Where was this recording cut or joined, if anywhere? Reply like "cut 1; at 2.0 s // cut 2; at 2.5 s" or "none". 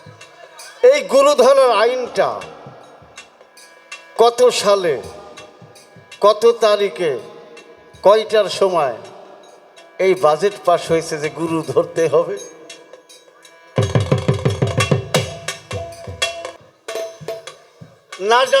cut 1; at 16.7 s